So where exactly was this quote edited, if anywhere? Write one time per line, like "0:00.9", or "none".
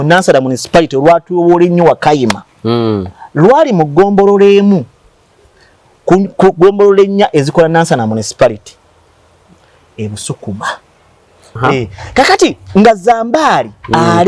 0:11.5